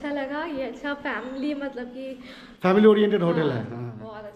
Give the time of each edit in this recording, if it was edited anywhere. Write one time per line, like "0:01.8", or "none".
none